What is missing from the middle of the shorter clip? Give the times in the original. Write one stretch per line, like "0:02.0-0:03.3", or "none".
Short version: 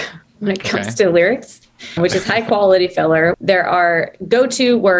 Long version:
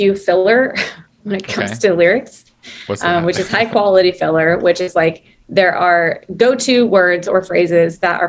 0:02.8-0:03.2
0:04.6-0:05.4